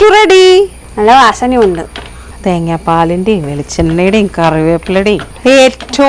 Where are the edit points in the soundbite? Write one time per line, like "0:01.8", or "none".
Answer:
none

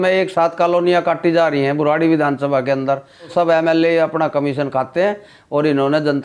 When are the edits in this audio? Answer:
0:03.3

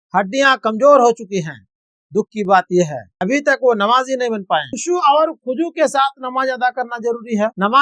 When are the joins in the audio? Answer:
0:03.1
0:04.7

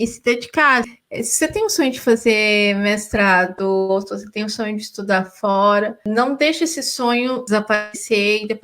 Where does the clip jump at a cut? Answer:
0:01.0
0:06.0
0:07.4

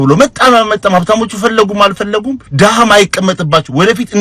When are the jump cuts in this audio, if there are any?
0:02.4

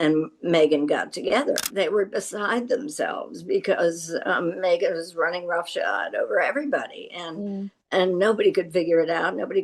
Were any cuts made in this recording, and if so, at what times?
0:01.7

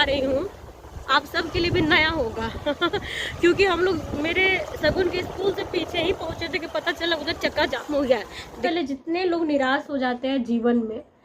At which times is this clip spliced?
0:08.6

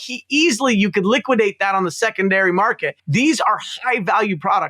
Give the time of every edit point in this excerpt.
0:03.0

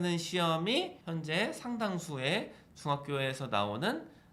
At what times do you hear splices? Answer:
0:01.0

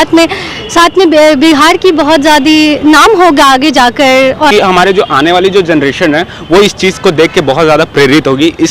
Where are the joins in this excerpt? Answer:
0:04.5

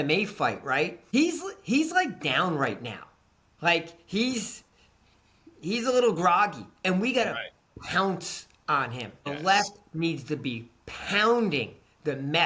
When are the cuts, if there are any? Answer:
0:01.0
0:09.2

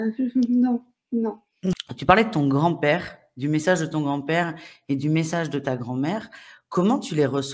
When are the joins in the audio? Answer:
0:01.8

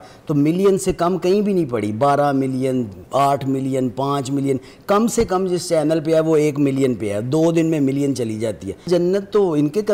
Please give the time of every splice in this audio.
0:08.8

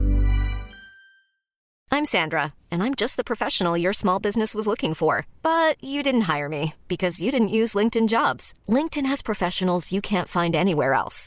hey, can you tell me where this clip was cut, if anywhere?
0:01.7

